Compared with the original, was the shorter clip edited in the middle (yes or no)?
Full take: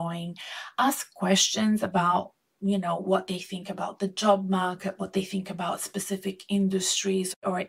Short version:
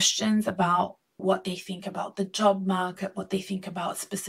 yes